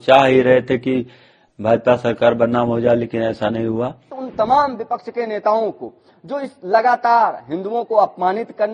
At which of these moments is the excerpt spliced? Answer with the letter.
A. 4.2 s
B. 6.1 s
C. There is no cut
A